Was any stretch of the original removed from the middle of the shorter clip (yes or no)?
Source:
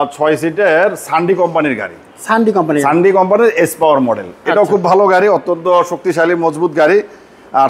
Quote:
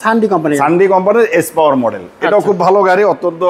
no